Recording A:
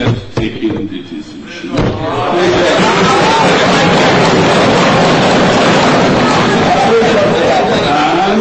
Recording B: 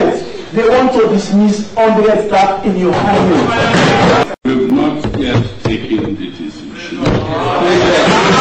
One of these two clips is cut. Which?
B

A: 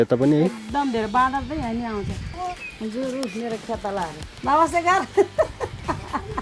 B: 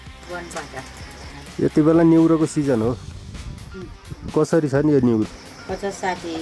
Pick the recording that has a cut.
A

